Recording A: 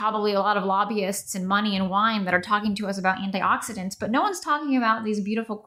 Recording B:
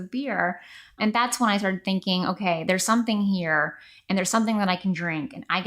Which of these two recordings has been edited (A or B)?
B